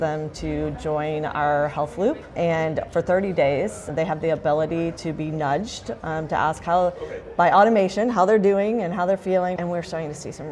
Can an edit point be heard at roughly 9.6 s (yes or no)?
yes